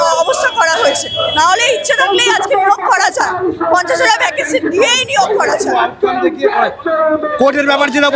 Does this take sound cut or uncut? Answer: uncut